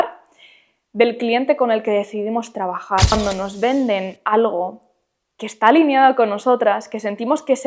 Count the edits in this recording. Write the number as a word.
one